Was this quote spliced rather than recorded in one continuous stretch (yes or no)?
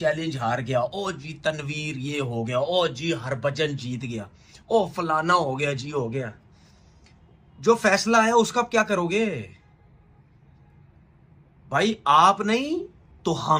no